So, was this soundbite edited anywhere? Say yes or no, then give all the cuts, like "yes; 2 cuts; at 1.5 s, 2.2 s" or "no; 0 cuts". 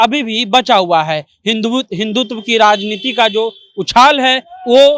no; 0 cuts